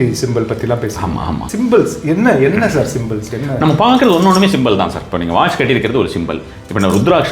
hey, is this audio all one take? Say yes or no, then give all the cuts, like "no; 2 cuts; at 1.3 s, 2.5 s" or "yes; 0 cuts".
no; 1 cut; at 1.4 s